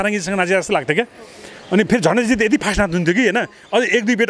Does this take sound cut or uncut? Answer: uncut